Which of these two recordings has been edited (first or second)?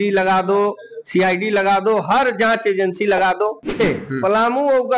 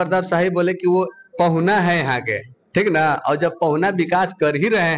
first